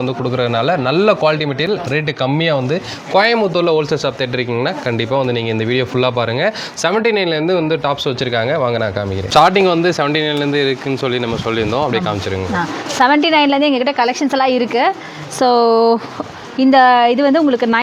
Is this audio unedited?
yes; 0 cuts

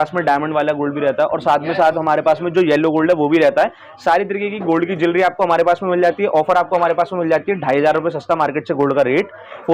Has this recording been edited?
no; 0 cuts

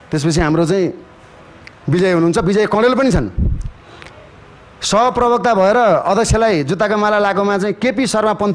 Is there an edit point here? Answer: no; 0 cuts

